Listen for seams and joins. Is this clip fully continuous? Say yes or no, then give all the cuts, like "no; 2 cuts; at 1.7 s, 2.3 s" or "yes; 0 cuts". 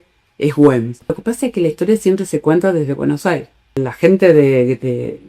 no; 2 cuts; at 1.2 s, 3.9 s